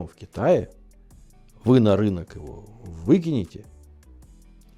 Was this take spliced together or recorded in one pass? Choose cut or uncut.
uncut